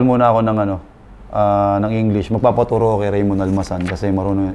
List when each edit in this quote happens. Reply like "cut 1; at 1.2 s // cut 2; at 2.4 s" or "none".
none